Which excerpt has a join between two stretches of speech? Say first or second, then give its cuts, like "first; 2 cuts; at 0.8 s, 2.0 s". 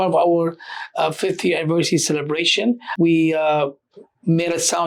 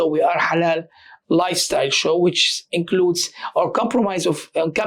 first; 1 cut; at 2.9 s